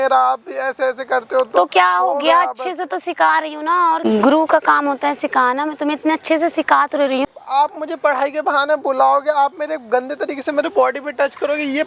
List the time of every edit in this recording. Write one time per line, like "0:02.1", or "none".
0:04.1
0:07.3

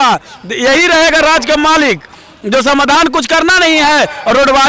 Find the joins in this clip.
none

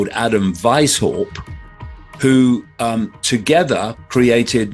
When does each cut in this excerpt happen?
none

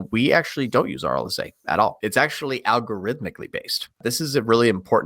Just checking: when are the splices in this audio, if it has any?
0:02.0
0:04.0

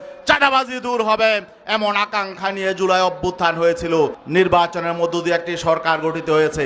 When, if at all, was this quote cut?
0:04.2

